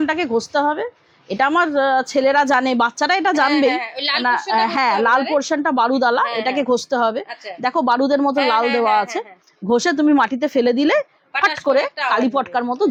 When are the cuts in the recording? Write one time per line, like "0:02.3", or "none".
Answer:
none